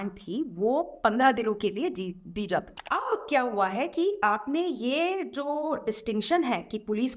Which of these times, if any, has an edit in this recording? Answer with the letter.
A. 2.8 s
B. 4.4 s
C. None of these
A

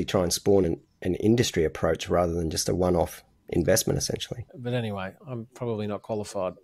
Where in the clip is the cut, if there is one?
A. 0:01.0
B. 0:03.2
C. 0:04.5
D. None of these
C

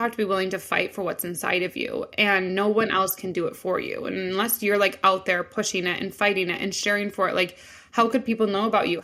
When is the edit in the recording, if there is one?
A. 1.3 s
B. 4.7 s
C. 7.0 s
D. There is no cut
D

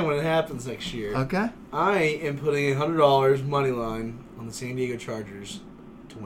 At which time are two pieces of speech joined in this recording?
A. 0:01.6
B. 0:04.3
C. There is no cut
A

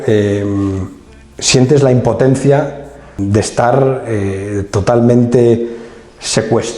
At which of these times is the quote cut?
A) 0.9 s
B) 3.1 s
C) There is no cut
B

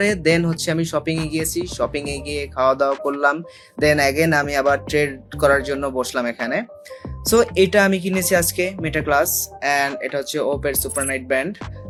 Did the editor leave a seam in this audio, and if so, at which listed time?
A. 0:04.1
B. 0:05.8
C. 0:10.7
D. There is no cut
D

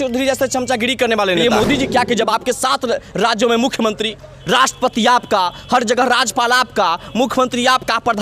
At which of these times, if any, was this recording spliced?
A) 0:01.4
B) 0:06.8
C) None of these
A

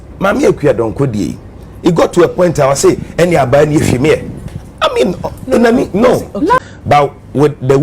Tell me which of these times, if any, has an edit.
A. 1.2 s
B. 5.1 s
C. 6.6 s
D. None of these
C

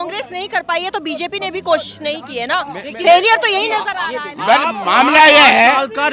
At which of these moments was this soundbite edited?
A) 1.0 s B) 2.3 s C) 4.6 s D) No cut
D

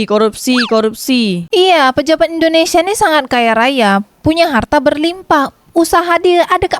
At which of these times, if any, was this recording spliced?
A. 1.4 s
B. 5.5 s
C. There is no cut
A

